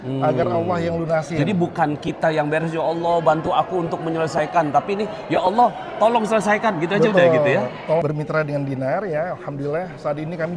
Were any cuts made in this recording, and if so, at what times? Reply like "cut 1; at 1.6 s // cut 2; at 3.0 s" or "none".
cut 1; at 8.0 s

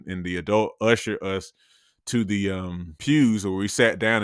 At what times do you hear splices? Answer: cut 1; at 2.9 s

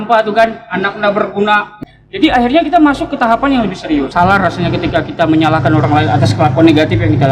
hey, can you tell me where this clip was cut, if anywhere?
cut 1; at 1.7 s // cut 2; at 4.1 s

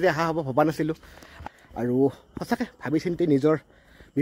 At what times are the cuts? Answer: cut 1; at 1.4 s

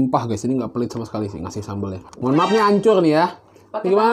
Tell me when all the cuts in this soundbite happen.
cut 1; at 2.1 s

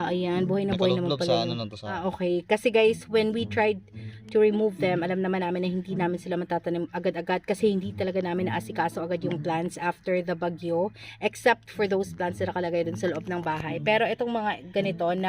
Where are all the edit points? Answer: cut 1; at 2.0 s

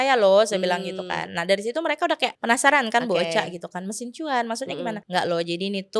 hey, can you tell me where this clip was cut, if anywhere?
cut 1; at 2.4 s // cut 2; at 5.0 s

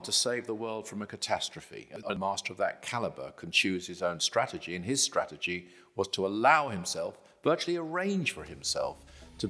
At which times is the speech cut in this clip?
cut 1; at 2.0 s

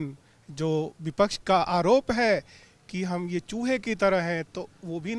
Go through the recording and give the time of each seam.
none

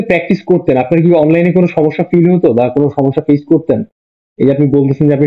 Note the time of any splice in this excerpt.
none

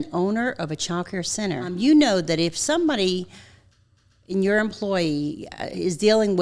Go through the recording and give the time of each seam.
cut 1; at 1.7 s

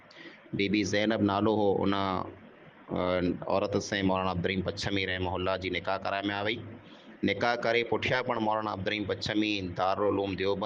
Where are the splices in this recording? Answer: none

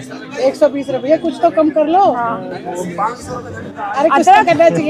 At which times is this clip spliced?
none

